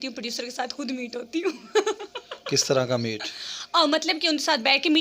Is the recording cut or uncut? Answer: uncut